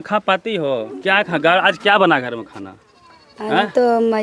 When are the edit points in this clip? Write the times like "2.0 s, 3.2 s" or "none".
none